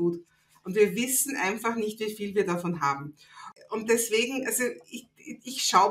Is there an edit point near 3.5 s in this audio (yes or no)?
yes